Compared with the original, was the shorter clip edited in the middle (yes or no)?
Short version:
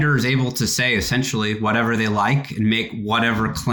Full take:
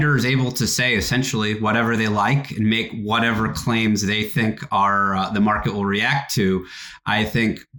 no